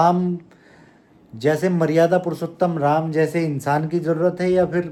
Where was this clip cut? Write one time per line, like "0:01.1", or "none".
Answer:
none